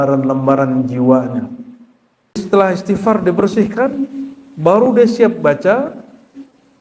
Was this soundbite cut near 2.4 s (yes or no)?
yes